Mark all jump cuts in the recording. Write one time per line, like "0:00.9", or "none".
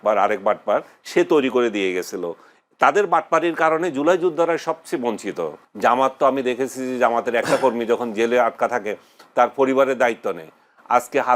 0:05.6